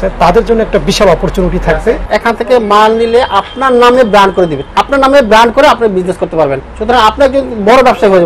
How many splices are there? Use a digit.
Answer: 2